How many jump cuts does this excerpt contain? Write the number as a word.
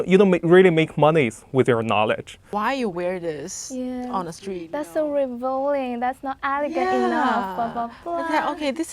one